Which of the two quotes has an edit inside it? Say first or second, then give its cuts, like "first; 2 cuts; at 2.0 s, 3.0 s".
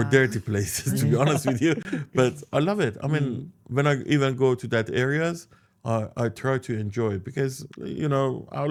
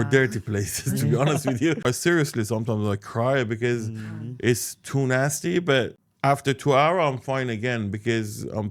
second; 2 cuts; at 1.8 s, 6.0 s